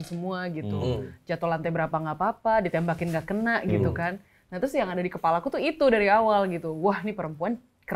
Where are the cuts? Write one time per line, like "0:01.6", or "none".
none